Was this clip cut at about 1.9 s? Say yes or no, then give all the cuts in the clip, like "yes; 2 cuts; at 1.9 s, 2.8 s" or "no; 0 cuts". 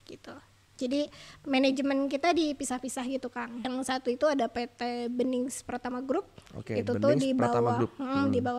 no; 1 cut; at 3.7 s